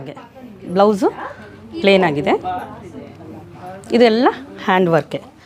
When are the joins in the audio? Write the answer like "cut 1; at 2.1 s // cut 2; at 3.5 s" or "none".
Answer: none